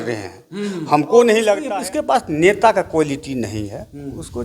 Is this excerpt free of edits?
no; 1 cut; at 1.6 s

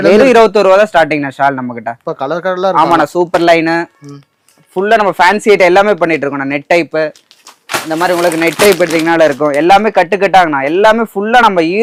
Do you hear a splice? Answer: no; 0 cuts

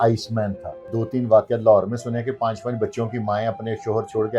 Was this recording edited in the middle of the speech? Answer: yes; 1 cut; at 0.9 s

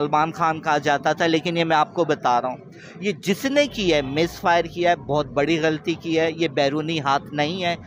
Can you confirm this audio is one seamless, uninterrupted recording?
yes; 0 cuts

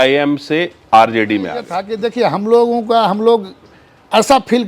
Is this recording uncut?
no; 1 cut; at 1.8 s

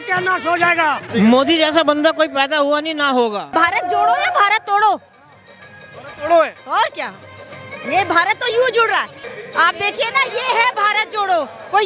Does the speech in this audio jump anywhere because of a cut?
yes; 3 cuts; at 1.0 s, 3.5 s, 9.2 s

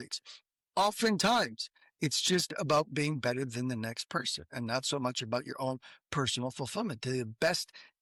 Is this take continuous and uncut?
yes; 0 cuts

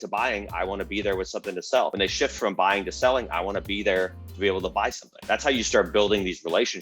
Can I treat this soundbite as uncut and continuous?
no; 2 cuts; at 1.9 s, 5.1 s

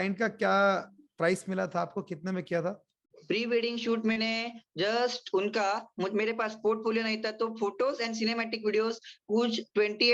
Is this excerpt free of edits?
yes; 0 cuts

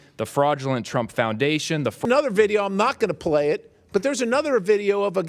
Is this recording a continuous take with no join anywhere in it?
no; 1 cut; at 2.0 s

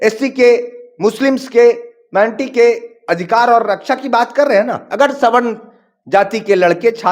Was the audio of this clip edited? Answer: yes; 1 cut; at 4.8 s

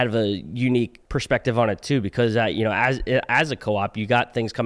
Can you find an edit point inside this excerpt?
yes; 1 cut; at 1.0 s

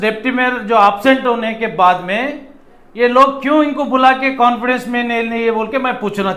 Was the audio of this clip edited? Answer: no; 0 cuts

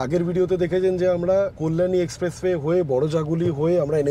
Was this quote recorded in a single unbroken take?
no; 1 cut; at 1.6 s

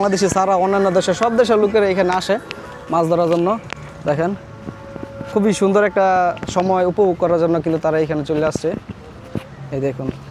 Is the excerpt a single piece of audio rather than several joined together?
yes; 0 cuts

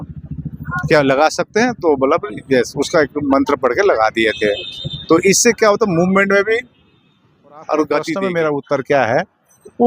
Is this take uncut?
no; 1 cut; at 8.2 s

